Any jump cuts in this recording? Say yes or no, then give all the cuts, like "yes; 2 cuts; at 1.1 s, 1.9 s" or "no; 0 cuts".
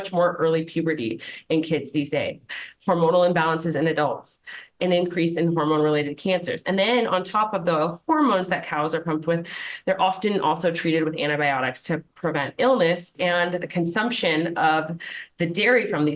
yes; 1 cut; at 13.1 s